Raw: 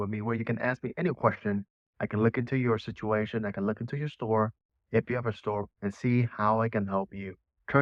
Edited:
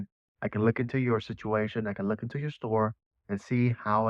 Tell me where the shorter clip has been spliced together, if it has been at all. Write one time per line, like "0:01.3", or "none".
0:03.2

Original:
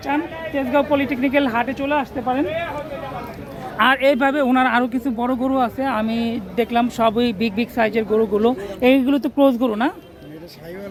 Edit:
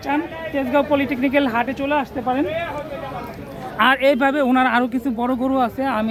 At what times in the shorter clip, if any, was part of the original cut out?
none

